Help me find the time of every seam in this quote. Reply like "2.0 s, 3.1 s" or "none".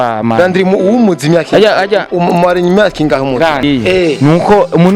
3.6 s